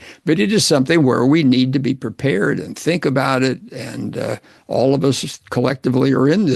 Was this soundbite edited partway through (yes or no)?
no